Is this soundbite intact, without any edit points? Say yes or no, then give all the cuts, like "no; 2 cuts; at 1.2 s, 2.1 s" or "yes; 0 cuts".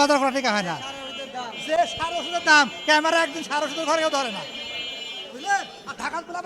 yes; 0 cuts